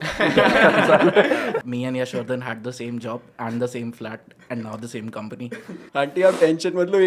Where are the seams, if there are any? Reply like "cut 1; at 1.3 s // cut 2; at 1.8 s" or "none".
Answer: cut 1; at 1.6 s // cut 2; at 5.8 s